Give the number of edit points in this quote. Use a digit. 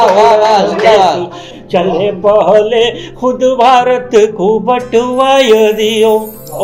0